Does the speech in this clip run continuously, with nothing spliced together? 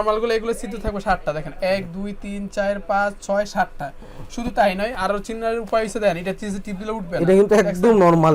yes; 0 cuts

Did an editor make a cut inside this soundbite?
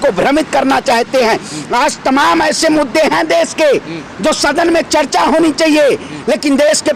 no; 0 cuts

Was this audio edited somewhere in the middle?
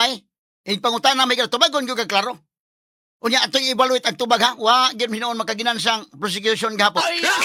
no; 0 cuts

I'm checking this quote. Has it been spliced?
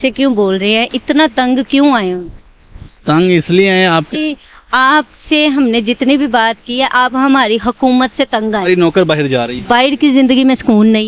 yes; 2 cuts; at 4.1 s, 8.6 s

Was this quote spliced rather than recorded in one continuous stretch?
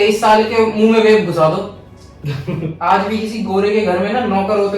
yes; 1 cut; at 2.7 s

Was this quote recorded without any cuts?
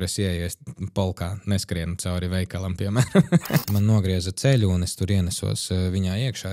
no; 1 cut; at 3.6 s

